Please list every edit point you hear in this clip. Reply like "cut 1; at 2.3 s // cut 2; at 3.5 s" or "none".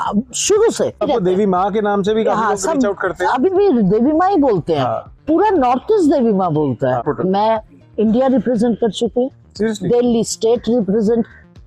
cut 1; at 1.0 s // cut 2; at 7.0 s